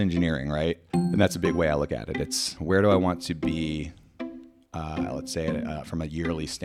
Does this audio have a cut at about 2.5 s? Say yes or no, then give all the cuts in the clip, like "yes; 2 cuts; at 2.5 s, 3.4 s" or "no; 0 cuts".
yes; 2 cuts; at 0.9 s, 2.5 s